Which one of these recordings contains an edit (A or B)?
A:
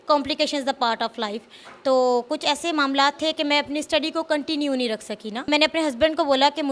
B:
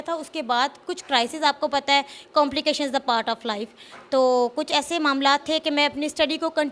A